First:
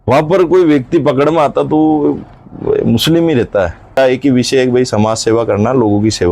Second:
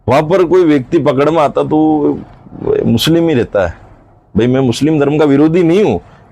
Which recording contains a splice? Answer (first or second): first